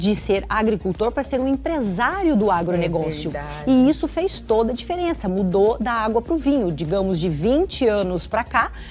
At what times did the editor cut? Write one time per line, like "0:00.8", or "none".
none